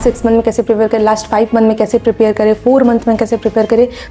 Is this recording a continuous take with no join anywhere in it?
yes; 0 cuts

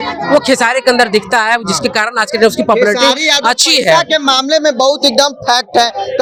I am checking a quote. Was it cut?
no; 0 cuts

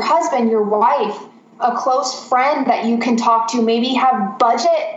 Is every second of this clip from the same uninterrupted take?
yes; 0 cuts

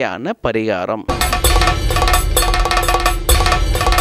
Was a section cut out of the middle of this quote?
yes; 1 cut; at 1.0 s

